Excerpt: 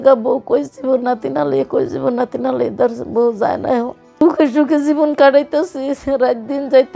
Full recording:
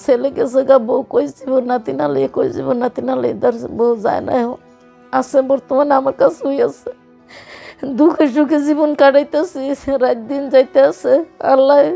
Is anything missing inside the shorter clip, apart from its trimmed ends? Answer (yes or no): yes